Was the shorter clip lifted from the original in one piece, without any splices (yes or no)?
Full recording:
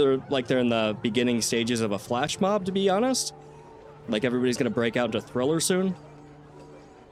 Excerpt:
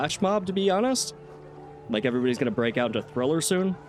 yes